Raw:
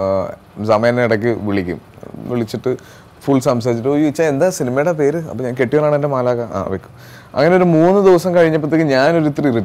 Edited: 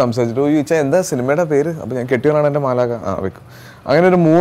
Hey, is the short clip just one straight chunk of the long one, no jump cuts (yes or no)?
yes